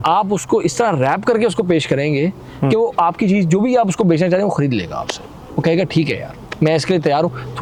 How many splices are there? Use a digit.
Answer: 0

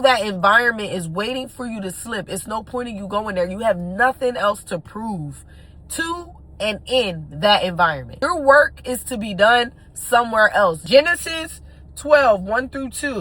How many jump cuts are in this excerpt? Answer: 2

